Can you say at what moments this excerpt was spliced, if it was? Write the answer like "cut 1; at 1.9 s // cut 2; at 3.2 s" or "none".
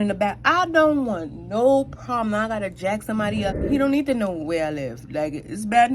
cut 1; at 3.6 s